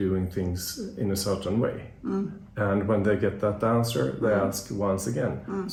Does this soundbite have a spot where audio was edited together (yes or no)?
no